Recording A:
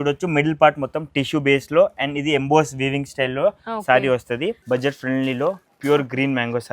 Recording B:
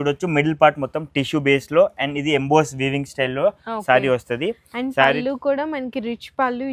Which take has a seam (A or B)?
A